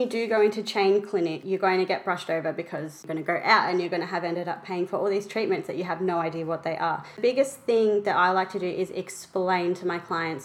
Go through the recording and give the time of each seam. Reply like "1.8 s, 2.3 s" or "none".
1.4 s, 3.1 s, 7.2 s